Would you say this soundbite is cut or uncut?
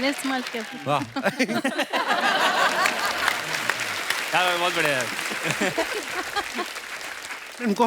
uncut